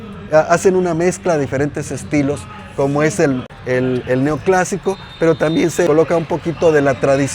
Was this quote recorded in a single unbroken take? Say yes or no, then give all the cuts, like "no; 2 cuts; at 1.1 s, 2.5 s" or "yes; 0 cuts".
no; 2 cuts; at 3.4 s, 5.9 s